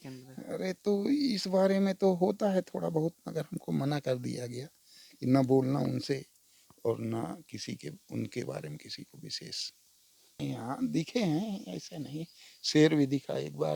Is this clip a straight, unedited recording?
no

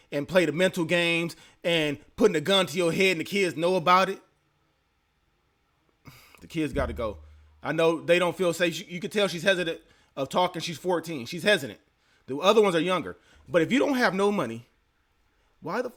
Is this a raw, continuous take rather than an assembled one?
yes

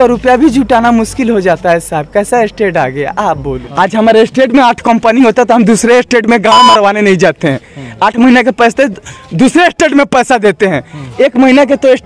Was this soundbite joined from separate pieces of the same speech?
yes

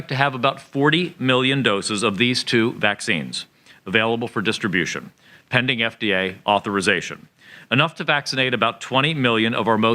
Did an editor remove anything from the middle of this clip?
no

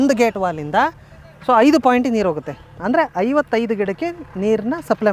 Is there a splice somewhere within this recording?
no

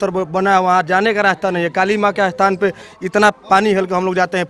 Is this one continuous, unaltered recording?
yes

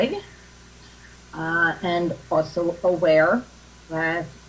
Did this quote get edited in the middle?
no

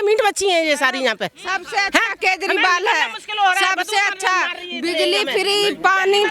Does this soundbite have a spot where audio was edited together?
no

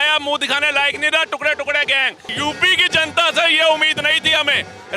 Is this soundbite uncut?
no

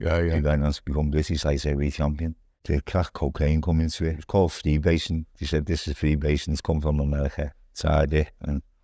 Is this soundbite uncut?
no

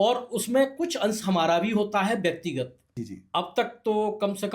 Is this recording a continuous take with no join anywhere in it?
no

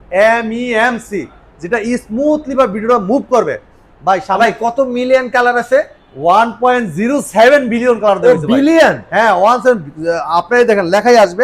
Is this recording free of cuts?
yes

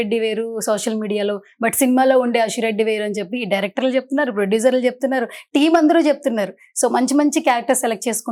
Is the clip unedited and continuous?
yes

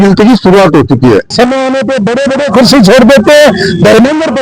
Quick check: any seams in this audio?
yes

